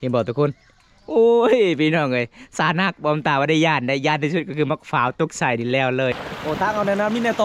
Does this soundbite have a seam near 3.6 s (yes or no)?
no